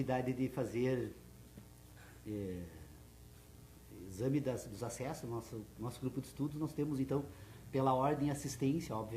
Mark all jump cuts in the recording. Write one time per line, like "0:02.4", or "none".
0:04.3